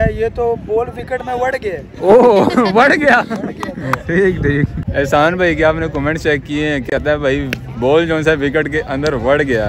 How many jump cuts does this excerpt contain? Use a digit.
0